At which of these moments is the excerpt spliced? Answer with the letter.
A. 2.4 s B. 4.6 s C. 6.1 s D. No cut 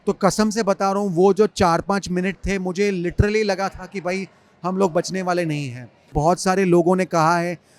C